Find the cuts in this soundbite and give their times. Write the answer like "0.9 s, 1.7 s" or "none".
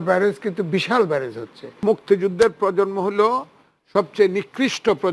1.8 s